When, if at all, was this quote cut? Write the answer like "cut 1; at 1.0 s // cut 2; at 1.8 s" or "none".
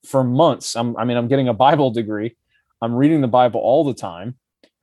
none